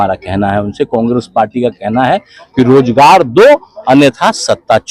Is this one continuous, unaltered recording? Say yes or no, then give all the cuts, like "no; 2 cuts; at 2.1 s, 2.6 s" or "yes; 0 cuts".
yes; 0 cuts